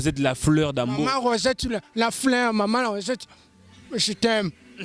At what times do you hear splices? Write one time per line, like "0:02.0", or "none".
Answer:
none